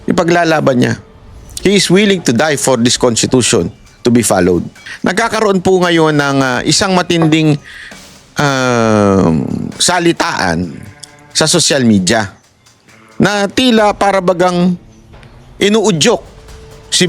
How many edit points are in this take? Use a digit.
1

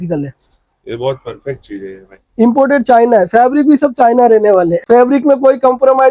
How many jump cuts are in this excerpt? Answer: 1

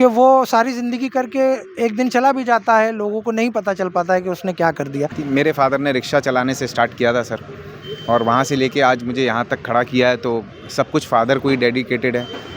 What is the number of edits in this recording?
1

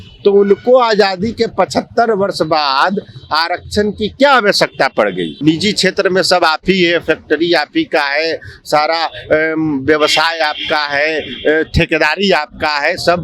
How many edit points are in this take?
1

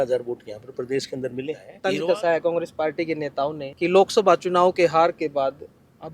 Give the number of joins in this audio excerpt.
2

